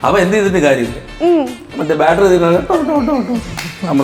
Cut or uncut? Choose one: uncut